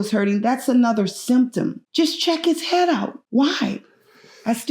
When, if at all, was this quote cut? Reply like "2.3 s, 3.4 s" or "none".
1.8 s, 3.2 s